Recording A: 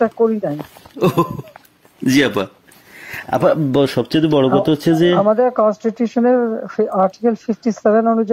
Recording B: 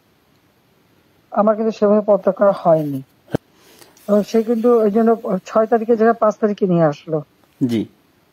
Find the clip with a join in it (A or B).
B